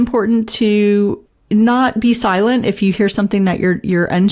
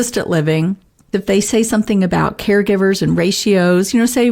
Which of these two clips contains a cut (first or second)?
second